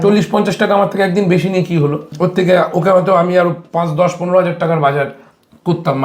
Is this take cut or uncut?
cut